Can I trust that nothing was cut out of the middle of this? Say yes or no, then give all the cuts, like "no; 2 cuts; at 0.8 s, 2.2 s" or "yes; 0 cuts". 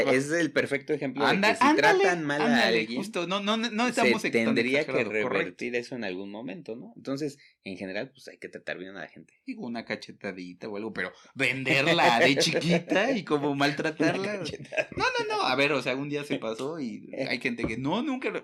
yes; 0 cuts